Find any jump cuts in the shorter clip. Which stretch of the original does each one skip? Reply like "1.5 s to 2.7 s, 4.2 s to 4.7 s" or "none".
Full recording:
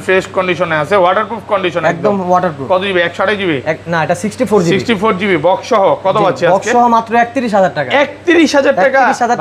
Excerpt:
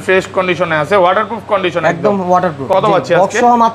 2.7 s to 6.0 s